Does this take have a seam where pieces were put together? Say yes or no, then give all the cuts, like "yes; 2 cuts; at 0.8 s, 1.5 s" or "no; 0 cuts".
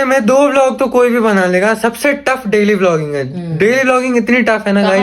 no; 0 cuts